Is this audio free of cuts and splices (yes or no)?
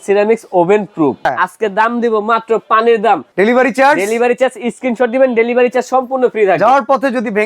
no